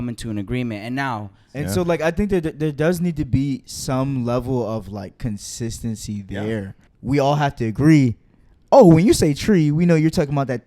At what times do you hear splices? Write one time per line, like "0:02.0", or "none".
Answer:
0:01.4
0:06.8